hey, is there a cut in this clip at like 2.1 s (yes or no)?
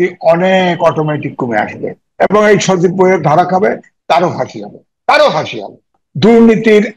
no